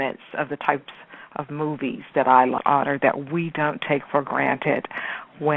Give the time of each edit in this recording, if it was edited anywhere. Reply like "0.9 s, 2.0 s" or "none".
none